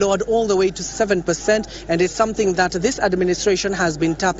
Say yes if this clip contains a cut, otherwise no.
yes